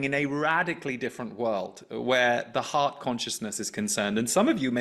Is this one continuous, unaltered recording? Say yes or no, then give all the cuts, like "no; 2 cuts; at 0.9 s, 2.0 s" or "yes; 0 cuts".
yes; 0 cuts